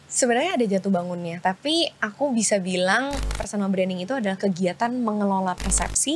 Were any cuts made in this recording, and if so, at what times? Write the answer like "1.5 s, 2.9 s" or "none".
3.2 s